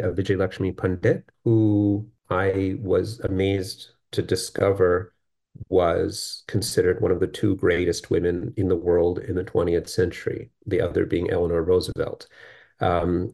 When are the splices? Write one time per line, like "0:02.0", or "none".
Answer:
0:01.3
0:02.1